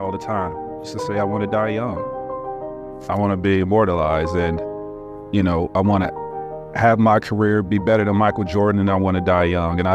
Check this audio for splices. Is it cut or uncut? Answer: cut